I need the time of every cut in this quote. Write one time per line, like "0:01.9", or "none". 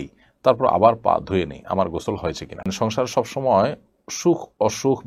0:02.7